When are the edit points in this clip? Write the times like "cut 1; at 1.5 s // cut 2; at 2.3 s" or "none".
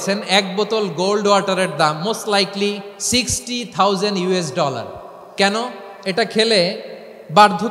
cut 1; at 2.9 s // cut 2; at 5.2 s